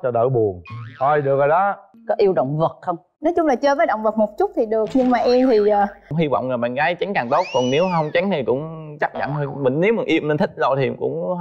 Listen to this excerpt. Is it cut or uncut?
cut